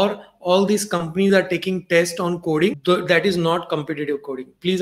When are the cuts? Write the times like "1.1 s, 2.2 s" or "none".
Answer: 2.8 s